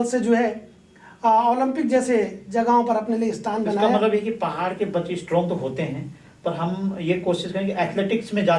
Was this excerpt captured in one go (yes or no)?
yes